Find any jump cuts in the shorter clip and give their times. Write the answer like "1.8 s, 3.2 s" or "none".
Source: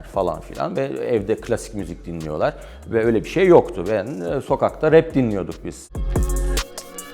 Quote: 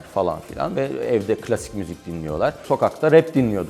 2.6 s

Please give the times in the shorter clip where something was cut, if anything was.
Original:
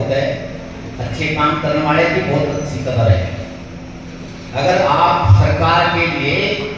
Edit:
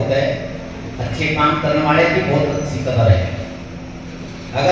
none

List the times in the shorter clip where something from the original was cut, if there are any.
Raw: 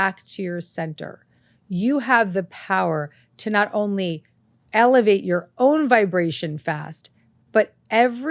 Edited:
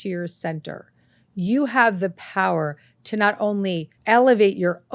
3.9 s

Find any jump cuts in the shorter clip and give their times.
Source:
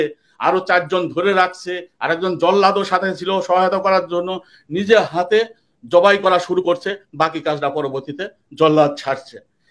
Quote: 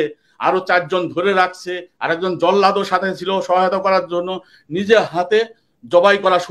none

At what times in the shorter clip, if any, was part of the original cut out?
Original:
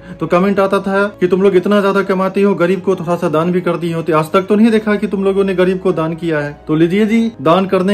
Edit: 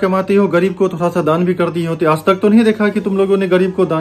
none

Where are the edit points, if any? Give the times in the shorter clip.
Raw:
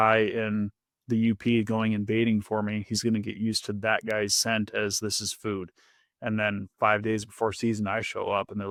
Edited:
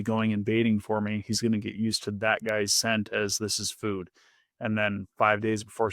none

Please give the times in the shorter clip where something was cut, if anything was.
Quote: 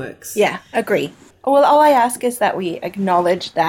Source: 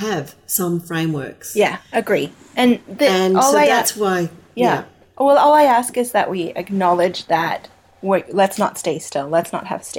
1.2 s

